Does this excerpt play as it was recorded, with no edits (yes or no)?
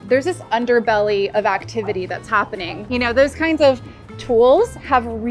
no